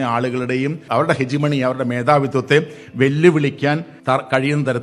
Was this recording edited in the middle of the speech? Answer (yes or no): yes